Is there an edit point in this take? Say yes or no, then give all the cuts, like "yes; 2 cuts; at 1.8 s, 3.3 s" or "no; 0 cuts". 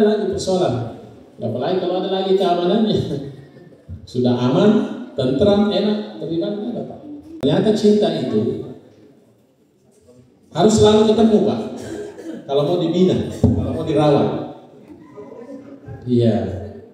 yes; 1 cut; at 7.4 s